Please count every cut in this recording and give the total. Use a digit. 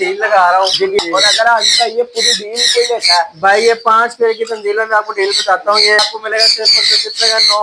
2